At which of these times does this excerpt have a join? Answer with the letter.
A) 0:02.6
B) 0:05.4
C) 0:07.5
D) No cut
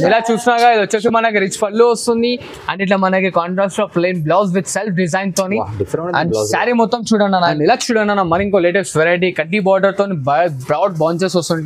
C